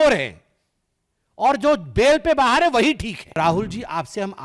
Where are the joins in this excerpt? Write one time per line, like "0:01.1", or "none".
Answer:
0:03.4